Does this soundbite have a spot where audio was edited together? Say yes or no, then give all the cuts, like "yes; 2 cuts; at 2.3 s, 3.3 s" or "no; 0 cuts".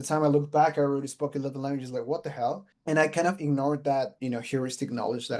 yes; 2 cuts; at 2.7 s, 4.1 s